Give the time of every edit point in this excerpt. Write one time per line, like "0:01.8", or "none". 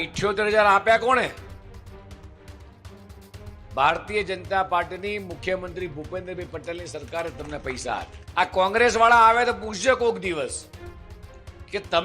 0:08.2